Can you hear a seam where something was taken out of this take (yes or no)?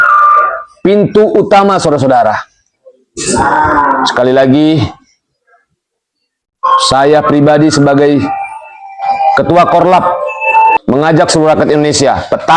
yes